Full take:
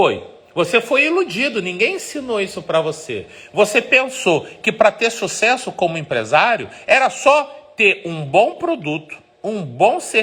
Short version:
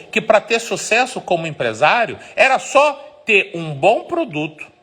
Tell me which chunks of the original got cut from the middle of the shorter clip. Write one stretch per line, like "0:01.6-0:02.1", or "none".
none